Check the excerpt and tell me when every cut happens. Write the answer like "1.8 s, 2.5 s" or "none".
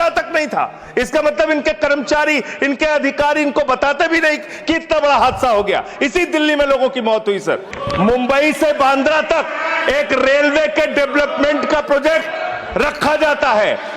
7.8 s